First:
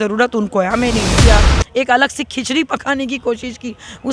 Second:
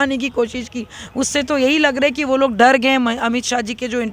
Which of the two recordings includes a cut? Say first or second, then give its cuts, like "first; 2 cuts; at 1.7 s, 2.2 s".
first; 1 cut; at 1.2 s